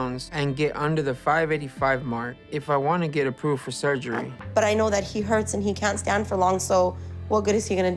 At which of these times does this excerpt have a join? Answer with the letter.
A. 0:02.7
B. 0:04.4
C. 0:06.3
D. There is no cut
D